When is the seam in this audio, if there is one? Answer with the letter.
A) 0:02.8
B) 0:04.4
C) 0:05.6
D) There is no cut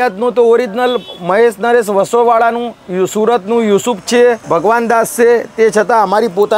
B